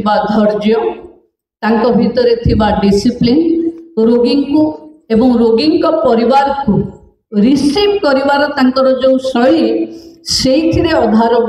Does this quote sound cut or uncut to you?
uncut